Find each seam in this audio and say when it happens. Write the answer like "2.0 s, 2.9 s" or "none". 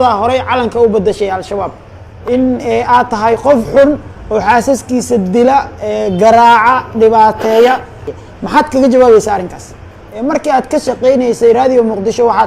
2.1 s, 8.1 s, 10.0 s